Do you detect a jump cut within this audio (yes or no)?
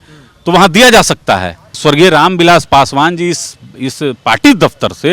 yes